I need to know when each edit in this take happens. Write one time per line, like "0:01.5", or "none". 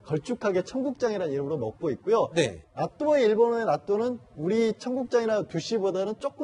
none